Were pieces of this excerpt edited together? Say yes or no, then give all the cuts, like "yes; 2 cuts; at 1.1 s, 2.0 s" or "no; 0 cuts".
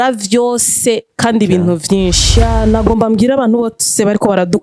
yes; 1 cut; at 2.4 s